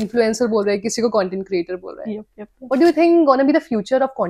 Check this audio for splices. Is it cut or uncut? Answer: uncut